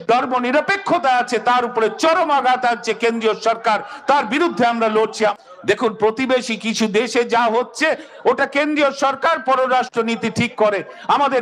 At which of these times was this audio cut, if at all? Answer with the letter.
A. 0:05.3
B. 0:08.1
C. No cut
A